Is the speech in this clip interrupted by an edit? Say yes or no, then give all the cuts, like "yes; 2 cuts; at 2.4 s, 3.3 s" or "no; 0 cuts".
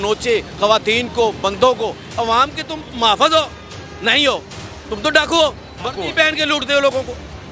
yes; 1 cut; at 2.0 s